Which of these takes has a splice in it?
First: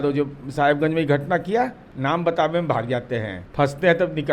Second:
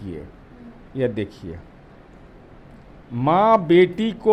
first; 2 cuts; at 1.8 s, 3.4 s

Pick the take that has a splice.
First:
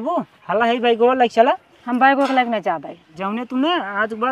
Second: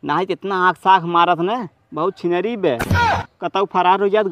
first; 1 cut; at 3.2 s

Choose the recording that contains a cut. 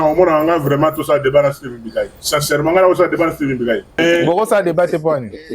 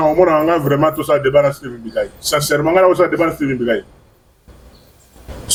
first; 1 cut; at 4.0 s

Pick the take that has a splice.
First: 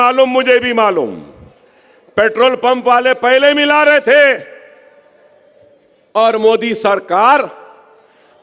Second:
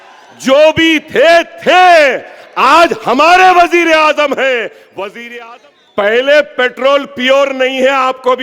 second; 1 cut; at 5.2 s

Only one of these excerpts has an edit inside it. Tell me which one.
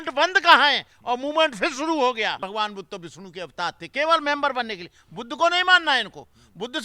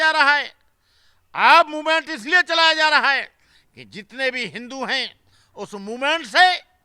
first; 1 cut; at 2.4 s

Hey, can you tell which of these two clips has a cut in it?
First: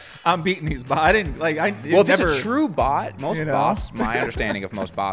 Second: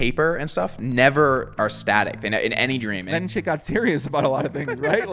second; 1 cut; at 3.0 s

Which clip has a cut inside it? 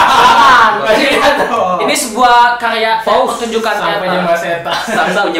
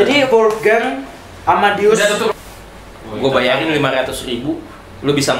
second; 1 cut; at 2.3 s

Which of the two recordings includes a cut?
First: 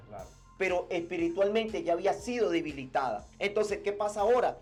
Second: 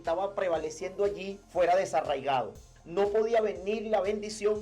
second; 1 cut; at 1.3 s

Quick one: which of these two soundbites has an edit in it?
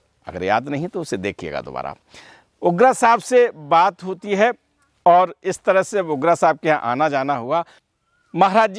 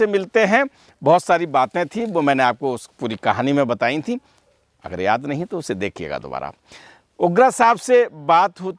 first; 1 cut; at 7.8 s

